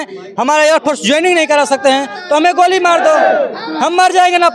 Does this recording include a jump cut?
no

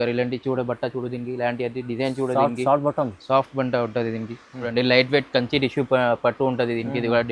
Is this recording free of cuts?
no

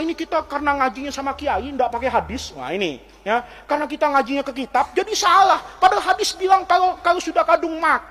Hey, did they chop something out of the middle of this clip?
no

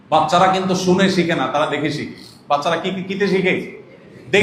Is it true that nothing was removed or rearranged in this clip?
yes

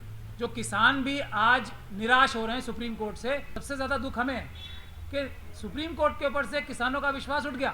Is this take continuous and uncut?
no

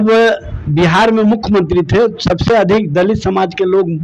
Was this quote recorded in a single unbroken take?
yes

